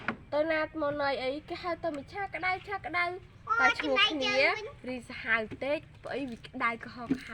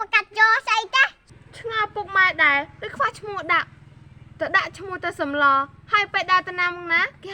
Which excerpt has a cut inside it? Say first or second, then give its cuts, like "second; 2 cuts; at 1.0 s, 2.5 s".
second; 1 cut; at 1.2 s